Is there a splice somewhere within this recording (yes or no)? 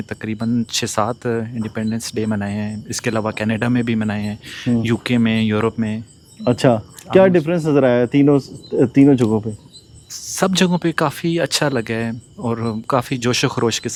no